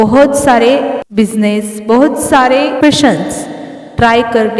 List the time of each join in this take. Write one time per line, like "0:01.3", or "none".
0:01.0
0:02.8